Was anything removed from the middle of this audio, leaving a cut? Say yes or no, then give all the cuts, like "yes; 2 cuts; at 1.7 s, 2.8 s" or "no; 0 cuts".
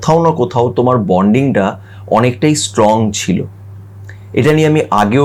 no; 0 cuts